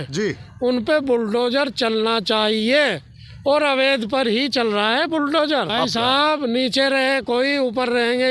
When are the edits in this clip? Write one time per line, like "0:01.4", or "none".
0:05.7